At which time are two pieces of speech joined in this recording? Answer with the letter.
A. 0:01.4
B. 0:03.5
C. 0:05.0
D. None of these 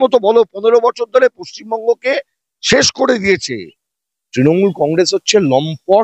B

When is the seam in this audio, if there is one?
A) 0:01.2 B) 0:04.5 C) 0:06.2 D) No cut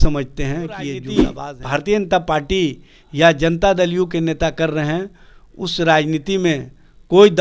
A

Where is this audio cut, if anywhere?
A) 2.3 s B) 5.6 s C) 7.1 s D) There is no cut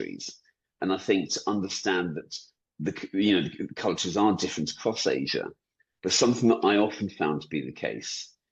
D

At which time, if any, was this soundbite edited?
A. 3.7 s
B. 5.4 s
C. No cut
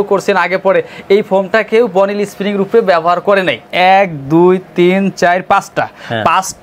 A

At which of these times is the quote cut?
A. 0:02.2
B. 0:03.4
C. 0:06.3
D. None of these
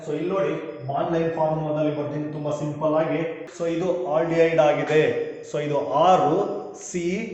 B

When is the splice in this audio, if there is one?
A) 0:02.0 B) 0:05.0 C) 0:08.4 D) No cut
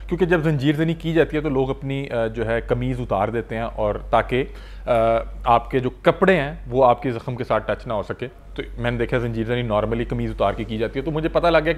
D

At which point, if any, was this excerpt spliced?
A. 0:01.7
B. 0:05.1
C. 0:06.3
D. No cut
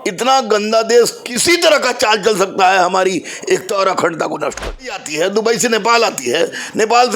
B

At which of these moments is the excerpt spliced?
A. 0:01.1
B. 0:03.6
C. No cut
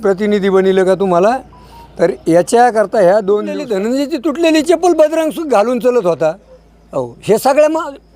B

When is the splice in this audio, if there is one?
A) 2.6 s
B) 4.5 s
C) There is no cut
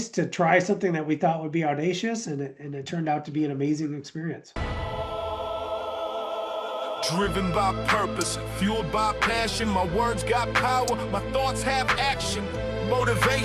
B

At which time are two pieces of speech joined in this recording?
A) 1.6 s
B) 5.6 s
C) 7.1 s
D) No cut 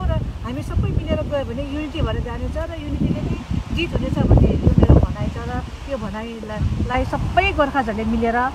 D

